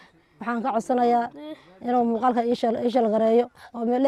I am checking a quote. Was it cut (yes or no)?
no